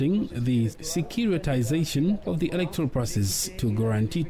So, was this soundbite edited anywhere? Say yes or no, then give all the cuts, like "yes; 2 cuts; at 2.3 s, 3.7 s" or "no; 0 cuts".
yes; 2 cuts; at 2.2 s, 3.5 s